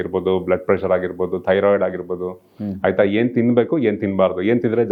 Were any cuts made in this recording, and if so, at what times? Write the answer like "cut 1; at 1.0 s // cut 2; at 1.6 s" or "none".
none